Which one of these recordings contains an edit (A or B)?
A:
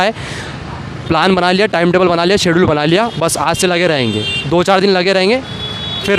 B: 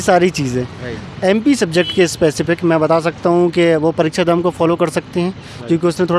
B